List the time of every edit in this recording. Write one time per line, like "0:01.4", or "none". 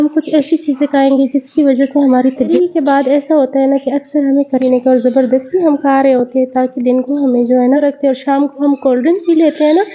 0:02.5
0:04.6
0:07.8